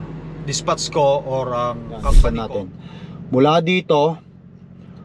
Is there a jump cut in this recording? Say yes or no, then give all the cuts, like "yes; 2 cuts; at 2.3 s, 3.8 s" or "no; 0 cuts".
yes; 1 cut; at 2.1 s